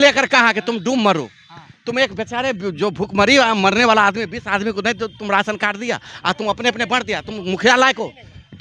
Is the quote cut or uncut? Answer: uncut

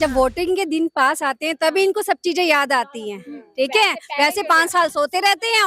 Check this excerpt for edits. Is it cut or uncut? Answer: uncut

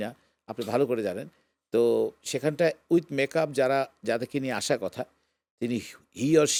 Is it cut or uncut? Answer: uncut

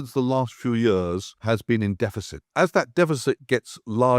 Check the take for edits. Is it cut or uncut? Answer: cut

